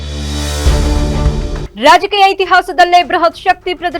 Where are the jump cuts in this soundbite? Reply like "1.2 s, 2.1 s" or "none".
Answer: 1.6 s